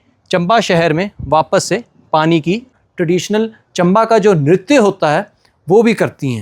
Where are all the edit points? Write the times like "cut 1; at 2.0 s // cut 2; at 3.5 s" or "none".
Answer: cut 1; at 2.8 s